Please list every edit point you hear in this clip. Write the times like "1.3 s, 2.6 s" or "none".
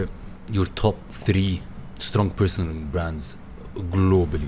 1.1 s